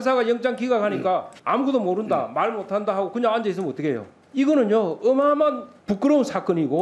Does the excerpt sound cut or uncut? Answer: cut